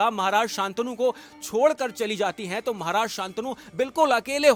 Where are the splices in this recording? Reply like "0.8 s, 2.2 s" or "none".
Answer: none

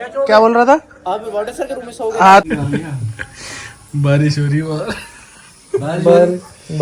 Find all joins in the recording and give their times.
2.4 s

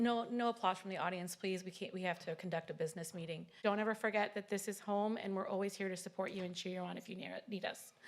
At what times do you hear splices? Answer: 3.6 s

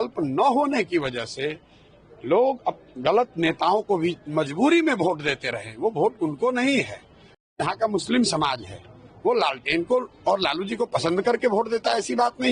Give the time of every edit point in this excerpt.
none

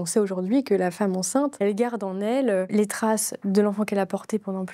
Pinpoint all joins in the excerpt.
1.5 s, 2.7 s

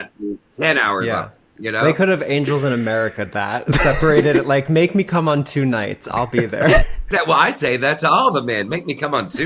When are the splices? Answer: none

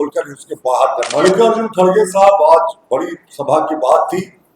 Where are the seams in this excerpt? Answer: 1.1 s

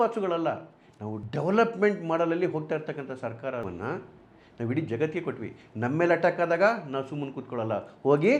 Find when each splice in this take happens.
3.6 s

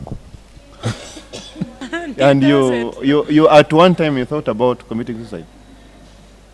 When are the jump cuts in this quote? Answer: 1.7 s

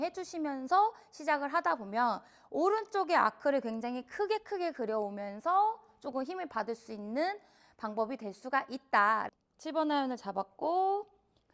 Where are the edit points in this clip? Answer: 9.3 s

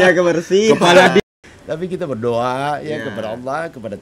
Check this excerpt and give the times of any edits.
1.2 s

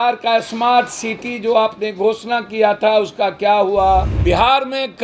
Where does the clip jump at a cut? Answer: 4.1 s

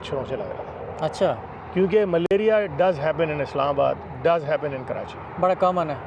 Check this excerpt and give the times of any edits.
none

